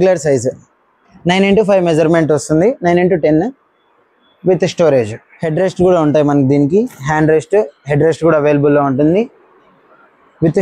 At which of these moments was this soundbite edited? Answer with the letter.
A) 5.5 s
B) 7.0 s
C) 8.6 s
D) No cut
D